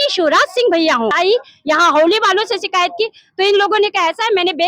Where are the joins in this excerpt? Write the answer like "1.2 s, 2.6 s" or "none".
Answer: 1.1 s